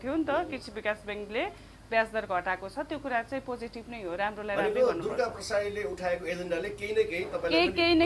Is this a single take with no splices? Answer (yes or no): yes